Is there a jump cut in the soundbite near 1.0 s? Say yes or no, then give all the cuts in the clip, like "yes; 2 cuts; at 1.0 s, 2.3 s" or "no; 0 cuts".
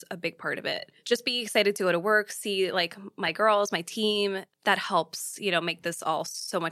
yes; 2 cuts; at 1.0 s, 4.5 s